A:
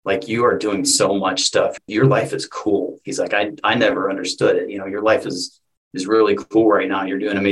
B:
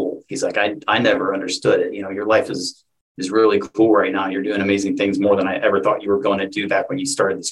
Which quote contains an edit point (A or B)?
A